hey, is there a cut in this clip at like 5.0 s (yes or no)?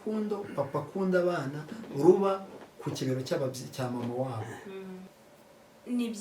yes